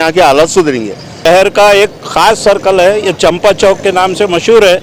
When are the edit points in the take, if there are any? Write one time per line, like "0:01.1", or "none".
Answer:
0:01.0